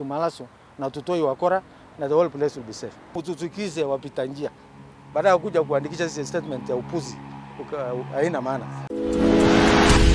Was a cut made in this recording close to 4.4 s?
no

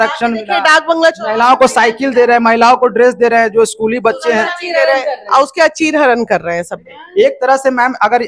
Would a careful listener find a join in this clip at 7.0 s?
no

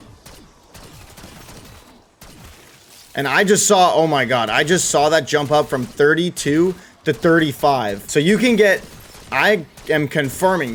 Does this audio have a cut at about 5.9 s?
no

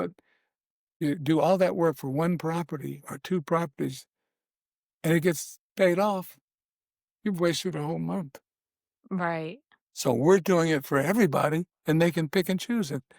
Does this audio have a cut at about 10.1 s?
no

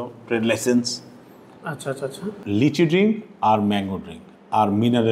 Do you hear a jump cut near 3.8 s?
no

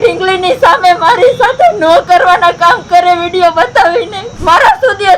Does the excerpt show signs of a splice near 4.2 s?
yes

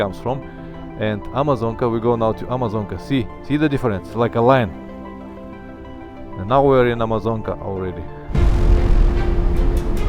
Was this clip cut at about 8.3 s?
yes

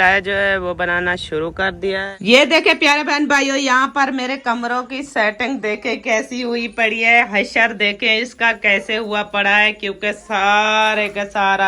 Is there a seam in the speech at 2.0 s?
yes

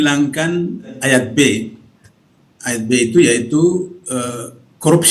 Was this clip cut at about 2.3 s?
no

